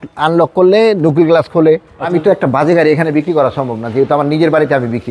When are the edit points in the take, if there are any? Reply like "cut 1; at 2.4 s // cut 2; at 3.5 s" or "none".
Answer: cut 1; at 2.1 s